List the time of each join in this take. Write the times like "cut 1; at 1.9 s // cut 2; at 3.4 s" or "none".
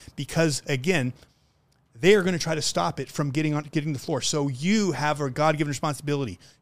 none